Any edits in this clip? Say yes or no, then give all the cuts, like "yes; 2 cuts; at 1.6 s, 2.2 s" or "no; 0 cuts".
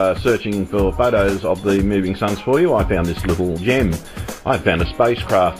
no; 0 cuts